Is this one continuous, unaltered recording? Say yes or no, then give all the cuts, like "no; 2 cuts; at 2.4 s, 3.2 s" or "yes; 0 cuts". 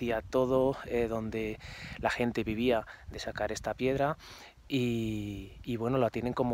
yes; 0 cuts